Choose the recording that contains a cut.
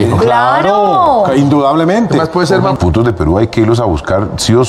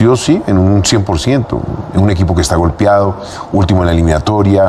first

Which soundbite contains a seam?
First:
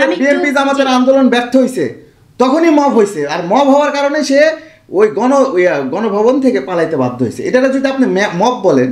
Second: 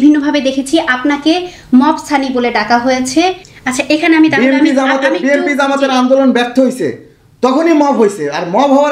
second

